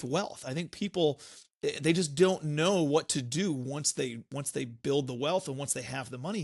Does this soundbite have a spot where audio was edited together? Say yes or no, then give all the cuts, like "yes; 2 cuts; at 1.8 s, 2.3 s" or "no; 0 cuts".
no; 0 cuts